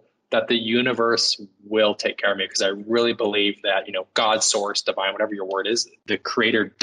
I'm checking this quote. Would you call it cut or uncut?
cut